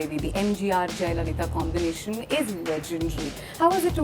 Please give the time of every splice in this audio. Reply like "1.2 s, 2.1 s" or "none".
none